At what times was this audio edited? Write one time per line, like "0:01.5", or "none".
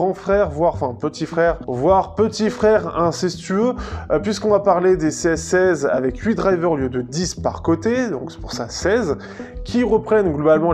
0:01.7